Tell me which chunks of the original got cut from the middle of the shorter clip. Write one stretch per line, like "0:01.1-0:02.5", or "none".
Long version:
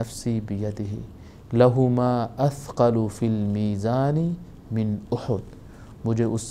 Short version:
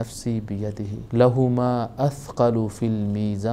0:01.0-0:01.4